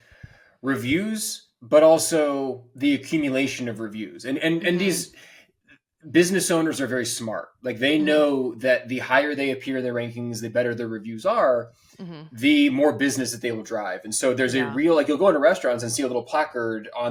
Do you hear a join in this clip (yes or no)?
no